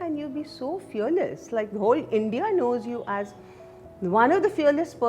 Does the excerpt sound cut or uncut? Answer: uncut